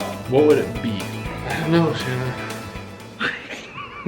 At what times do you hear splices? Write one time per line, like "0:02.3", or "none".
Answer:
0:01.2